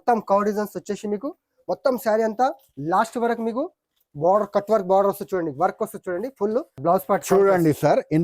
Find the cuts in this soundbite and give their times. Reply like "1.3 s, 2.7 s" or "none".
6.8 s